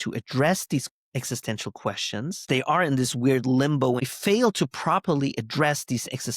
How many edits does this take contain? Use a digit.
2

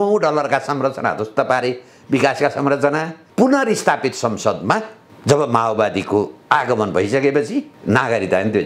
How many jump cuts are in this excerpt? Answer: 2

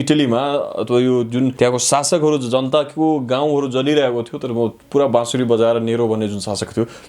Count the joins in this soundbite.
1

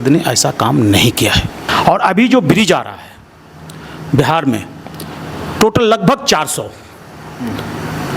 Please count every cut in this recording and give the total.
1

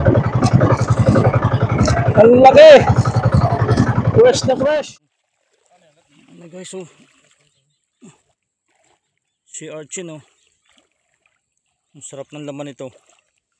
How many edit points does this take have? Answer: 1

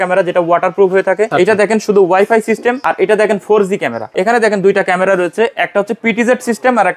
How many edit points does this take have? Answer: 3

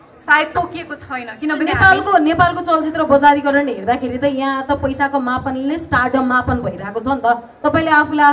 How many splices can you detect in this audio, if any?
0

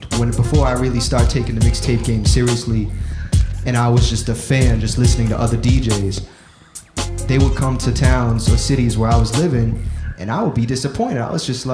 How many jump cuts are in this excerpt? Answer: 1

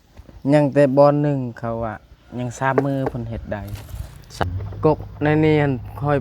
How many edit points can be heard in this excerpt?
1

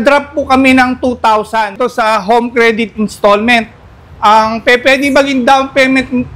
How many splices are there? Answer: 1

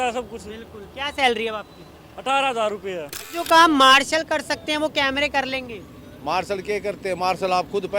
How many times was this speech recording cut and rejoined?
1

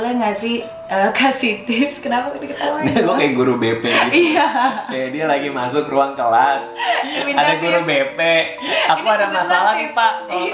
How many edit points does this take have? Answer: 0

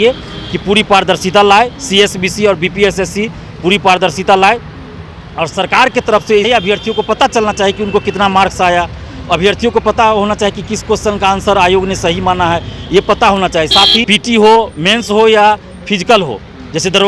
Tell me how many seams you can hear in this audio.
2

